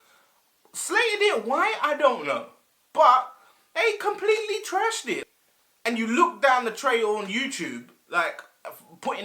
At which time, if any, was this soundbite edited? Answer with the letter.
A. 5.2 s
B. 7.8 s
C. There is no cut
A